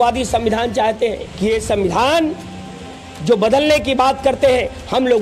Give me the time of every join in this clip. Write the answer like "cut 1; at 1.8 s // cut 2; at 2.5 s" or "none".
cut 1; at 1.3 s